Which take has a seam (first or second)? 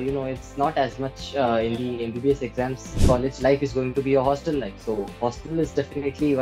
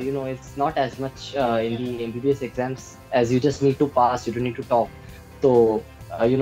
first